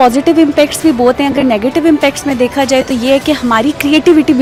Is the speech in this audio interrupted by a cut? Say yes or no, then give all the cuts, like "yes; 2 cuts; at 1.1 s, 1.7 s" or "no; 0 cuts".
no; 0 cuts